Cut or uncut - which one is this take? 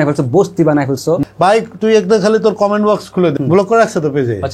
cut